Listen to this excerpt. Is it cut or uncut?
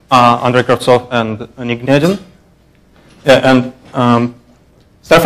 cut